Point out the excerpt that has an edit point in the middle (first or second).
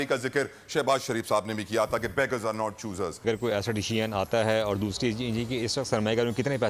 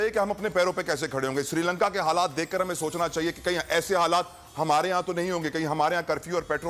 first